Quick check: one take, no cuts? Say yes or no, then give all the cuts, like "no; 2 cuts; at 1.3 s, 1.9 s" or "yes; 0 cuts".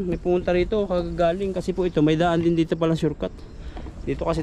yes; 0 cuts